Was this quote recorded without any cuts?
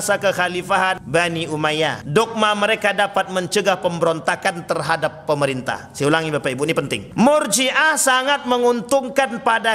no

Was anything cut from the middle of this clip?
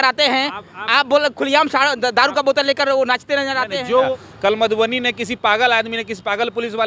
yes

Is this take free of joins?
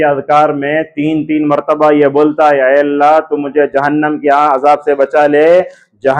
yes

